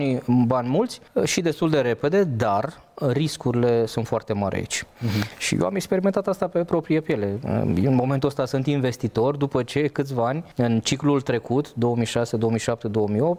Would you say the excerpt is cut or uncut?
cut